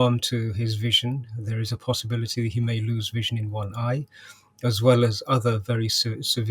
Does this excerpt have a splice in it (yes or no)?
no